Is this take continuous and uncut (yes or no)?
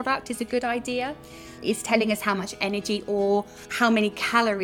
no